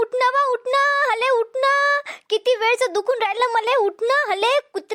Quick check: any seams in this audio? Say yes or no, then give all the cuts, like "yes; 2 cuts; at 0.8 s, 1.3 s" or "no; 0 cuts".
no; 0 cuts